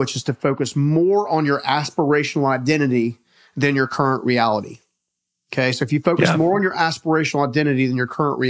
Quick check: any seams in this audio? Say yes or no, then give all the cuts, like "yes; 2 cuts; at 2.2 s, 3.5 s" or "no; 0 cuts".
no; 0 cuts